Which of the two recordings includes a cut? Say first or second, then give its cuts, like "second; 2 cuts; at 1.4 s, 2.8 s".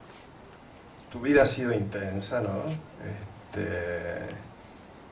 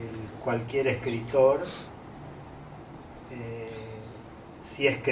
second; 1 cut; at 4.2 s